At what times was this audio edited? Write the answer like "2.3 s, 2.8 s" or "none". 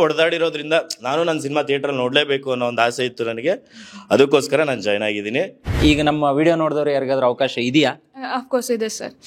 5.8 s